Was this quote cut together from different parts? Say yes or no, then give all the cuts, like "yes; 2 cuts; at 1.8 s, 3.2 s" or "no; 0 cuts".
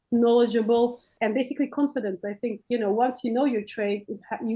yes; 1 cut; at 1.1 s